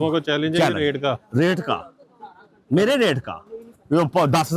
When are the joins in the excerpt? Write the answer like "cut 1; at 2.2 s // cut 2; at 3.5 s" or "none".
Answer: none

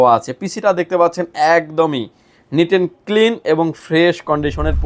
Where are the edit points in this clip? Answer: none

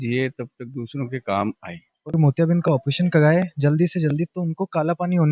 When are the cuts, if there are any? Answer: cut 1; at 2.1 s

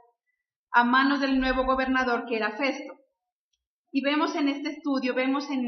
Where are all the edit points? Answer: cut 1; at 0.9 s

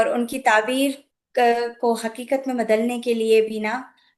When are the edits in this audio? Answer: none

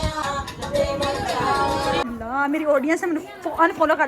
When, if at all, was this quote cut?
cut 1; at 2.0 s

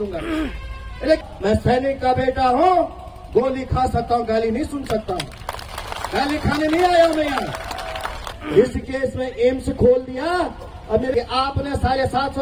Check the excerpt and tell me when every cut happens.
cut 1; at 1.2 s // cut 2; at 11.1 s

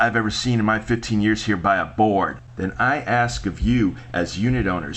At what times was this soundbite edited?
cut 1; at 2.5 s

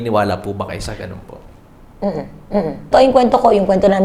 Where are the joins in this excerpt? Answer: cut 1; at 2.9 s

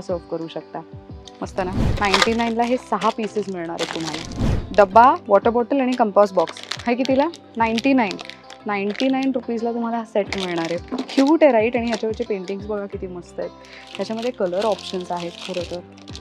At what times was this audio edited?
cut 1; at 1.9 s // cut 2; at 4.7 s

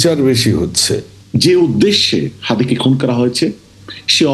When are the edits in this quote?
cut 1; at 1.2 s

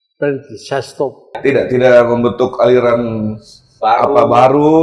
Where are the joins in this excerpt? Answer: cut 1; at 1.4 s

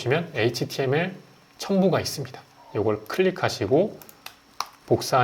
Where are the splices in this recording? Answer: none

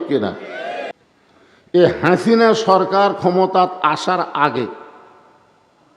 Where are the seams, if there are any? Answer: cut 1; at 1.0 s

